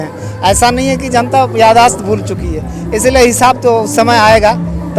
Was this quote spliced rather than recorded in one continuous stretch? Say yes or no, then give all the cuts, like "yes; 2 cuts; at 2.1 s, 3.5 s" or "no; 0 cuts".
no; 0 cuts